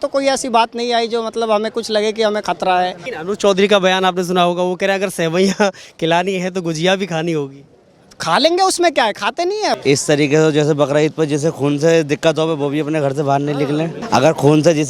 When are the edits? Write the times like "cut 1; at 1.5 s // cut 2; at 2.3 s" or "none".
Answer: cut 1; at 3.1 s // cut 2; at 9.7 s // cut 3; at 14.0 s